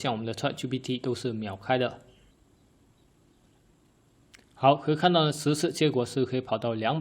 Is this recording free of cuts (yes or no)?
no